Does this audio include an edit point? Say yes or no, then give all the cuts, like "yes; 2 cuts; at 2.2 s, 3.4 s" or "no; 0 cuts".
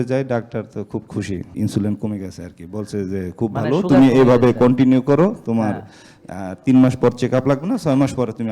yes; 1 cut; at 1.5 s